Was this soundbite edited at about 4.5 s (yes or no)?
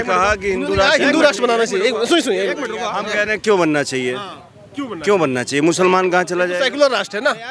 no